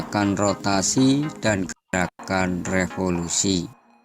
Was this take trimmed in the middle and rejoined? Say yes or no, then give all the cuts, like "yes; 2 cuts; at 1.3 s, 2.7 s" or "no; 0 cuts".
no; 0 cuts